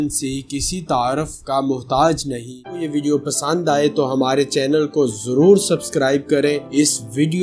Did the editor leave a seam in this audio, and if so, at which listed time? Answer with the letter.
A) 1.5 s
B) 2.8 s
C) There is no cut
B